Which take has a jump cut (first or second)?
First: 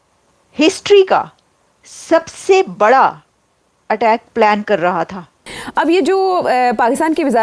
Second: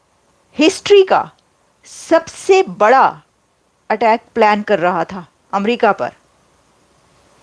first